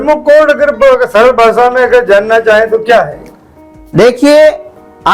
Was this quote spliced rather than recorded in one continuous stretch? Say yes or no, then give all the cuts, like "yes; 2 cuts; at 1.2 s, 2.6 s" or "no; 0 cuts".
no; 0 cuts